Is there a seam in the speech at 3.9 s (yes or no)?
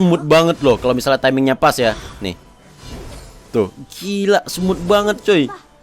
no